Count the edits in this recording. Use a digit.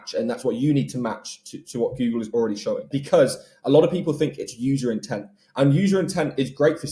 1